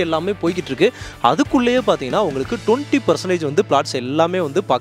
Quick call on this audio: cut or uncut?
uncut